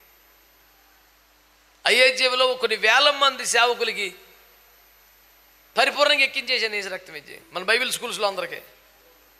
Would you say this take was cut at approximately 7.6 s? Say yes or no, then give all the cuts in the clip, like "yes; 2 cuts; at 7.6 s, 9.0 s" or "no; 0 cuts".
no; 0 cuts